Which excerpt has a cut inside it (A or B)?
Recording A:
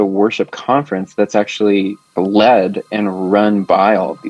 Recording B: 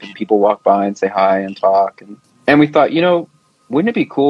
A